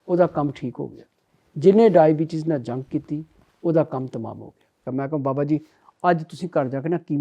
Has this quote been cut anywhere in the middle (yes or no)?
yes